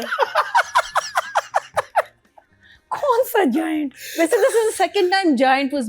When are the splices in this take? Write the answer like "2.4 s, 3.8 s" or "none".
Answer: none